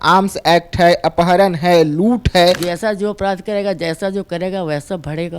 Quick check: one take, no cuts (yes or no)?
no